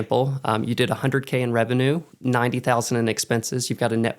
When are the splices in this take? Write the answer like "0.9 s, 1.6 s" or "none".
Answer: 2.1 s